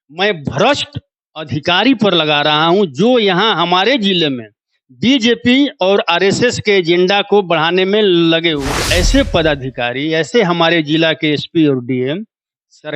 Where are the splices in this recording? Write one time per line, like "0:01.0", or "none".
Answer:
0:08.8